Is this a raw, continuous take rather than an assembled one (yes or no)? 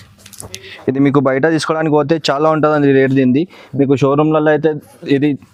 yes